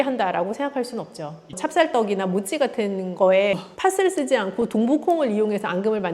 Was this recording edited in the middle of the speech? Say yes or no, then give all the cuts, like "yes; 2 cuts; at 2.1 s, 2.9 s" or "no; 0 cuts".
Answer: yes; 2 cuts; at 1.5 s, 3.6 s